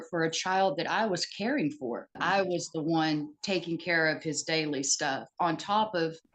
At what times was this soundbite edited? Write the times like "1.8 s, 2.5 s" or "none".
2.2 s